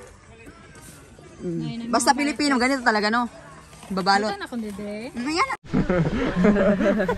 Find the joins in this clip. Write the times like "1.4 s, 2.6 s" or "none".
5.6 s